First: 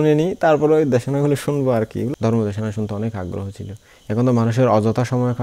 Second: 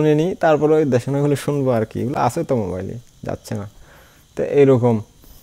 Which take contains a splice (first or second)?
first